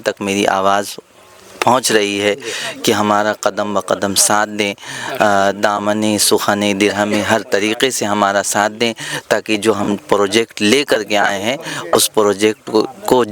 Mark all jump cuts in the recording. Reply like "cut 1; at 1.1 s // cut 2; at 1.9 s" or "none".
none